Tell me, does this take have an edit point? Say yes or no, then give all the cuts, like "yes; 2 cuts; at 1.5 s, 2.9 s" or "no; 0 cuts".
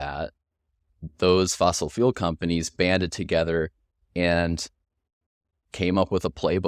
no; 0 cuts